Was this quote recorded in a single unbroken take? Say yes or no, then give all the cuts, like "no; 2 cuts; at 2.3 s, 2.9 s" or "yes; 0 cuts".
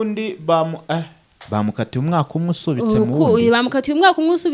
yes; 0 cuts